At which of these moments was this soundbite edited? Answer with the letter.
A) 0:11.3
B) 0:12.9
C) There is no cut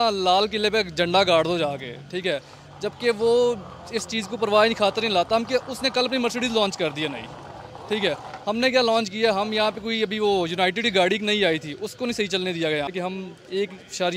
B